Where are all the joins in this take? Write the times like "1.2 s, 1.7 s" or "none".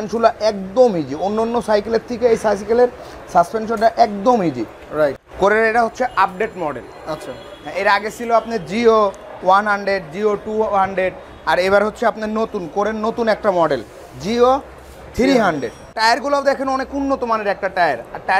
5.2 s, 15.9 s